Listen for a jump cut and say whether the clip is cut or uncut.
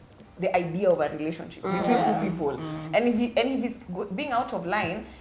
uncut